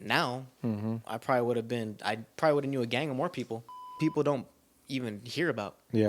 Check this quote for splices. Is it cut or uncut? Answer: cut